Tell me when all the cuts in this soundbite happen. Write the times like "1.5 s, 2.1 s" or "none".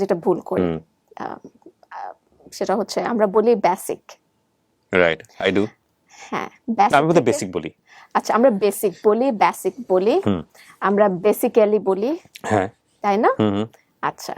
1.0 s